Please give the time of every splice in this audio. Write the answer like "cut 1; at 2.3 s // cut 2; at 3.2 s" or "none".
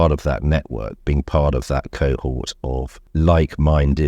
cut 1; at 3.0 s